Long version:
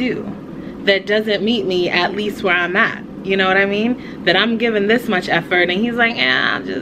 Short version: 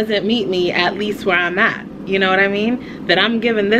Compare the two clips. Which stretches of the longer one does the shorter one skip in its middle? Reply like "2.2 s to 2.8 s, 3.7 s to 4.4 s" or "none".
none